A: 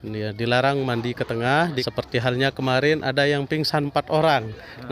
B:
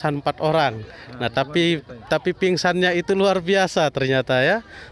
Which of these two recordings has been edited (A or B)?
A